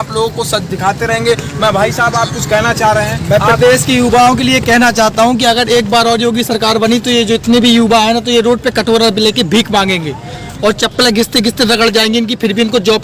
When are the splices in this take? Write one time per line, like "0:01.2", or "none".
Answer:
none